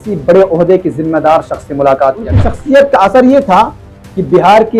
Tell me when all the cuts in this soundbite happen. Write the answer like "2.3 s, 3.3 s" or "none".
2.5 s